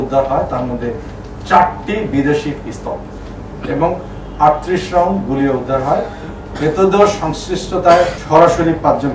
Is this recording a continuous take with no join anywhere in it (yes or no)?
yes